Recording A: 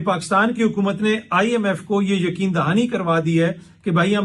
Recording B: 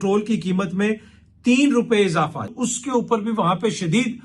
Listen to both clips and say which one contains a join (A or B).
B